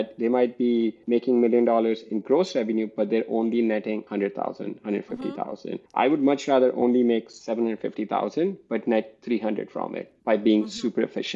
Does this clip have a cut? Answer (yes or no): yes